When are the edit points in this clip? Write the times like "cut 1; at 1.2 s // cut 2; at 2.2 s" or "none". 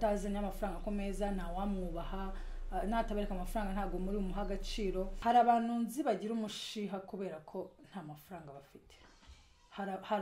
cut 1; at 5.1 s